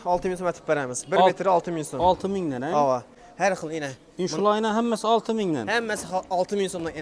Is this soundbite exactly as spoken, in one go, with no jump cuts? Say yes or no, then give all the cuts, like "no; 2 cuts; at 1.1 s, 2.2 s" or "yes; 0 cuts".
yes; 0 cuts